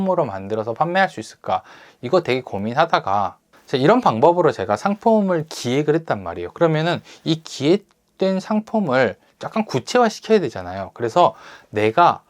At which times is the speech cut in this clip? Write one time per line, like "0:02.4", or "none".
0:03.4